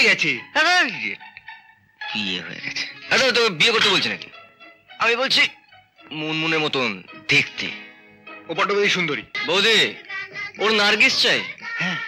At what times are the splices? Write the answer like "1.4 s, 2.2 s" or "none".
9.3 s